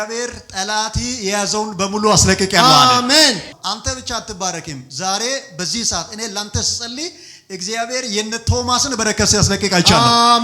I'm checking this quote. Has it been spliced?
yes; 1 cut; at 3.5 s

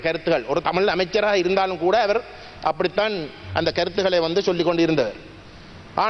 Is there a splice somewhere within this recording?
no; 0 cuts

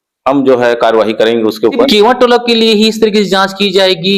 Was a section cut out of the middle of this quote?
yes; 1 cut; at 1.9 s

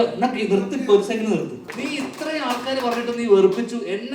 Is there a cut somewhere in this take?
yes; 1 cut; at 1.7 s

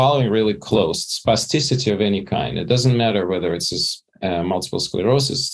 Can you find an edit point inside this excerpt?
no; 0 cuts

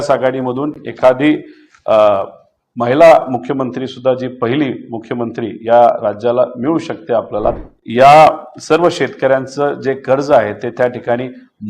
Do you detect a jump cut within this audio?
yes; 1 cut; at 7.6 s

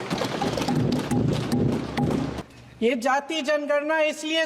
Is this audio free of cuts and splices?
no; 1 cut; at 2.4 s

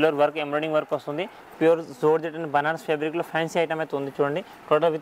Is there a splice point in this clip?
yes; 1 cut; at 1.5 s

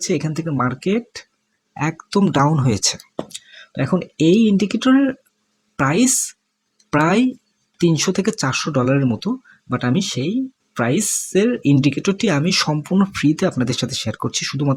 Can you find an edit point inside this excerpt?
no; 0 cuts

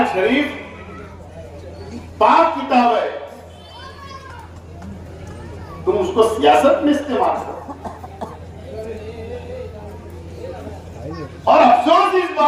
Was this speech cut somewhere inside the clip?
no; 0 cuts

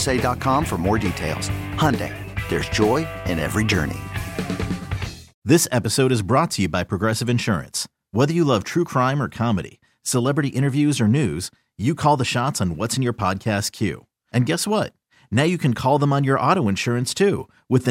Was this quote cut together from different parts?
yes; 1 cut; at 5.4 s

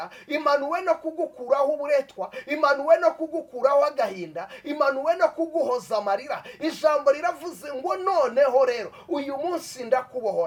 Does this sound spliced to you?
no; 0 cuts

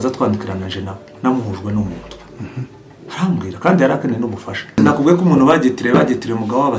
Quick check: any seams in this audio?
yes; 1 cut; at 4.8 s

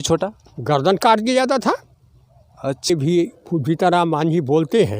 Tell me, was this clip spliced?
yes; 1 cut; at 2.9 s

